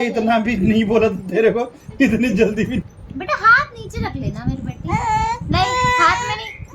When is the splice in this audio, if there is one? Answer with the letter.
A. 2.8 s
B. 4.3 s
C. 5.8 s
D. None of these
A